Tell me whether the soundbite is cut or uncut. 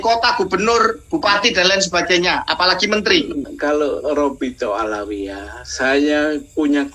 cut